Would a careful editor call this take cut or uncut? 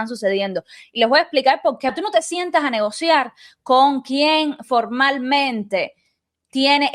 cut